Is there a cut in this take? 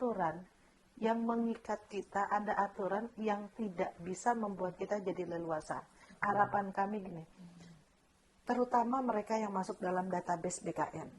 yes; 1 cut; at 6.1 s

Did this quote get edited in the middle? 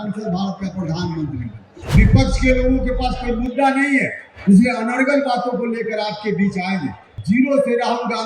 yes; 2 cuts; at 1.7 s, 7.1 s

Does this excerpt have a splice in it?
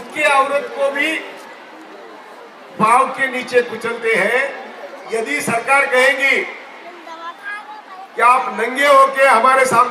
yes; 1 cut; at 5.0 s

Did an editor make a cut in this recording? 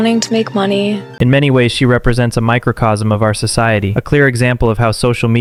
no; 0 cuts

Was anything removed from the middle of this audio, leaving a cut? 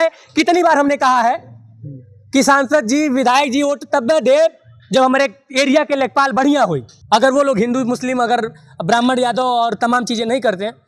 yes; 1 cut; at 6.9 s

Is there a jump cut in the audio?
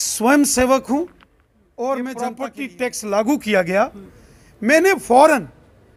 yes; 1 cut; at 2.6 s

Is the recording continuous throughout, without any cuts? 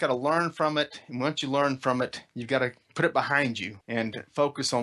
no; 2 cuts; at 2.9 s, 3.7 s

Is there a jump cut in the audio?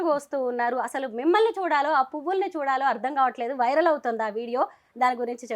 no; 0 cuts

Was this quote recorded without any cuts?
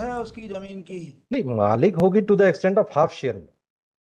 yes; 0 cuts

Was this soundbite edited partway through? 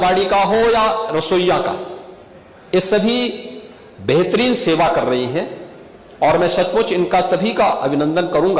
no; 0 cuts

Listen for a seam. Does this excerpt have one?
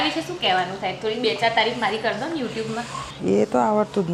no; 0 cuts

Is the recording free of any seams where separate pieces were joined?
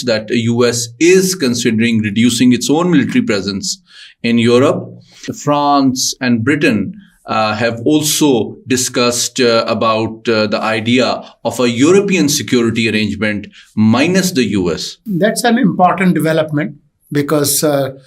no; 2 cuts; at 5.3 s, 15.0 s

